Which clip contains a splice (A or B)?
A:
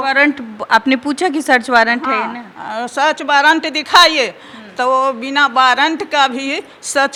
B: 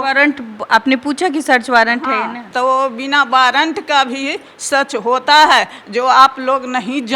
B